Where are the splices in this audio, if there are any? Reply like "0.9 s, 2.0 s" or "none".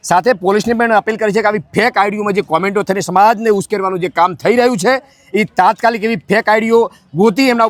none